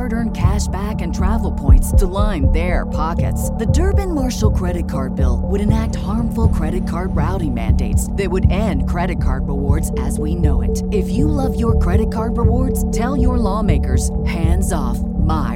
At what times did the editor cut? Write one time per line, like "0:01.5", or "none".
none